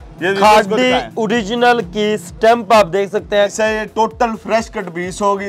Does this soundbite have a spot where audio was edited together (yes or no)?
yes